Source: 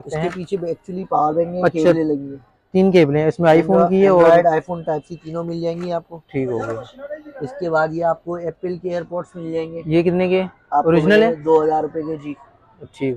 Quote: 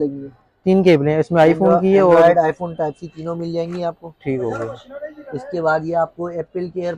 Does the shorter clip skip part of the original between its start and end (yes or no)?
no